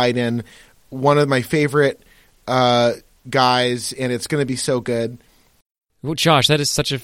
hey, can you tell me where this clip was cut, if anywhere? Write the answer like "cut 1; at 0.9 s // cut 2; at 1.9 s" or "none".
cut 1; at 5.8 s

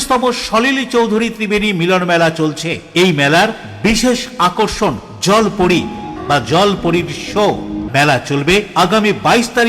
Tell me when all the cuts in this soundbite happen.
cut 1; at 6.1 s // cut 2; at 7.8 s

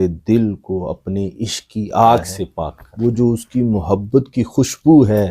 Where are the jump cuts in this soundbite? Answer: cut 1; at 2.8 s

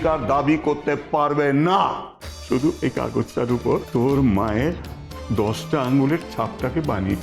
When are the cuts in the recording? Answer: cut 1; at 2.8 s // cut 2; at 3.9 s

